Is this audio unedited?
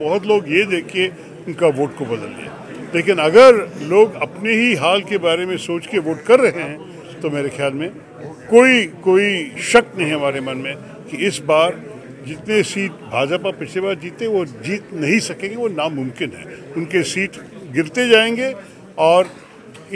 yes; 0 cuts

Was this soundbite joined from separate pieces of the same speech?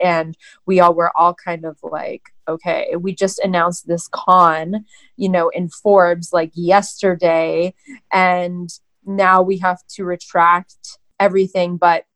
no; 0 cuts

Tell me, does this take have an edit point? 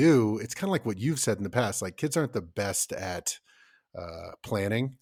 no; 0 cuts

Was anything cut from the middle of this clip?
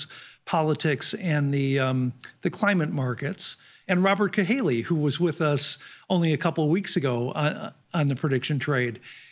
yes; 1 cut; at 3.7 s

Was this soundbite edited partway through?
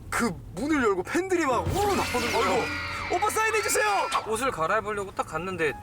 yes; 1 cut; at 4.2 s

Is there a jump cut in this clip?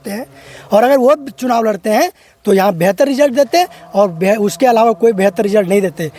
no; 0 cuts

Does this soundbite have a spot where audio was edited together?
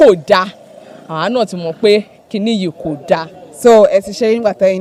no; 0 cuts

